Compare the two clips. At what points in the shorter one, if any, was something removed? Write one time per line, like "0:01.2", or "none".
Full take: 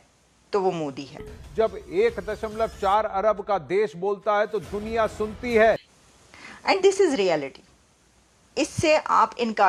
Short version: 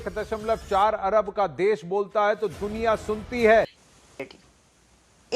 0:04.3